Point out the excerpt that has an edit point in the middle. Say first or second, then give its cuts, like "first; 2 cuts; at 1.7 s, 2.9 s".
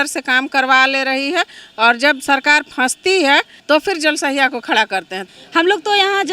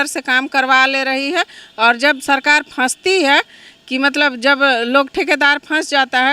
first; 2 cuts; at 3.5 s, 5.2 s